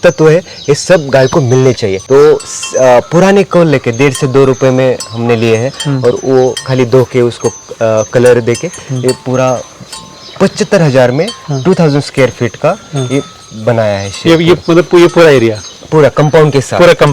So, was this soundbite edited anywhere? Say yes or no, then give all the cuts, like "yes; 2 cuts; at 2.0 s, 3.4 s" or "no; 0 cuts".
yes; 1 cut; at 1.9 s